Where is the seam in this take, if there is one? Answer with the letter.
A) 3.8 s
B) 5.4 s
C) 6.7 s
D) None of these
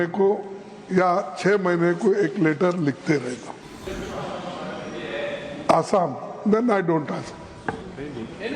A